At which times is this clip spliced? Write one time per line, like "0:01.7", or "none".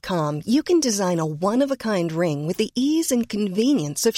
none